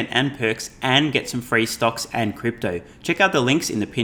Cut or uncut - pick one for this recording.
uncut